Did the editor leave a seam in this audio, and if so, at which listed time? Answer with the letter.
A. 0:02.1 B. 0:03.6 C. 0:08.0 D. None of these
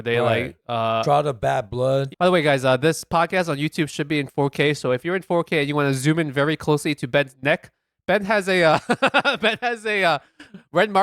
A